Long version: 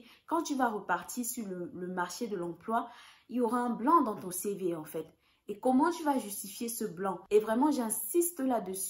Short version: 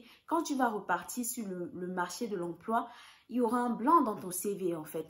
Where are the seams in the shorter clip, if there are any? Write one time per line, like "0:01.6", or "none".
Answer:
none